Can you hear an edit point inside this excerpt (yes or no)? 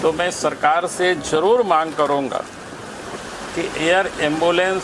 yes